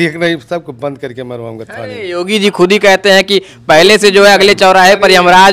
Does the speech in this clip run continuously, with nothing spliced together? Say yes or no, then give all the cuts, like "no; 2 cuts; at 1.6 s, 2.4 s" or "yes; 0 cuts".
yes; 0 cuts